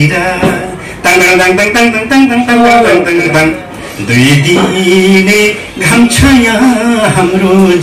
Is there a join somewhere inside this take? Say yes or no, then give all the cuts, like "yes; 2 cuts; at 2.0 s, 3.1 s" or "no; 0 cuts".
yes; 1 cut; at 3.3 s